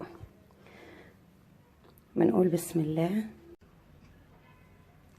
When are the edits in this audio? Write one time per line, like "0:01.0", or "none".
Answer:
0:03.6